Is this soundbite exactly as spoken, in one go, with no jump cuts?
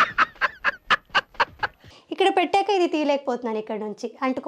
no; 1 cut; at 1.8 s

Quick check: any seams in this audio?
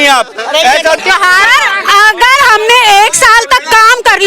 yes; 1 cut; at 1.0 s

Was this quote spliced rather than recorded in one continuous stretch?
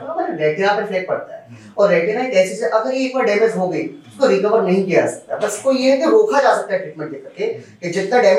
no; 0 cuts

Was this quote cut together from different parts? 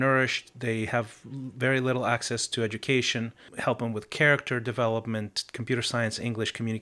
yes; 1 cut; at 3.4 s

